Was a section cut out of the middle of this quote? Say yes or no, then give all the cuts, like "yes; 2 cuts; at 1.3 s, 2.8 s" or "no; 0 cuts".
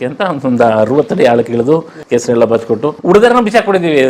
yes; 2 cuts; at 1.9 s, 3.0 s